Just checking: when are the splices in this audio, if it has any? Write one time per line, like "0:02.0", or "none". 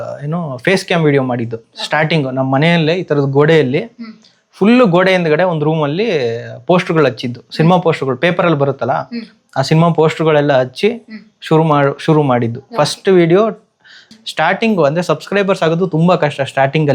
0:14.0